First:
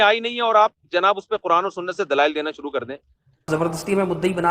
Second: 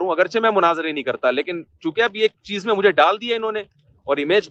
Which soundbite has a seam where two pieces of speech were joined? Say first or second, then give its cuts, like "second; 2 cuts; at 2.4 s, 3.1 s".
first; 1 cut; at 3.5 s